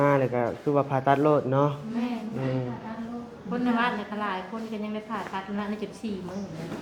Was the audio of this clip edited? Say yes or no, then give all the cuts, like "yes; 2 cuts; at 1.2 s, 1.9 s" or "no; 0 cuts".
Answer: no; 0 cuts